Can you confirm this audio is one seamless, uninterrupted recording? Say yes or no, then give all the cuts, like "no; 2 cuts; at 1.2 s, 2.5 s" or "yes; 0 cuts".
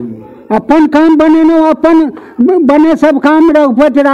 yes; 0 cuts